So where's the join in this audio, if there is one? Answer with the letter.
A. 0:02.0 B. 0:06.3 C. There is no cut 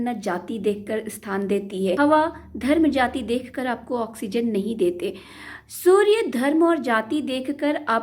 A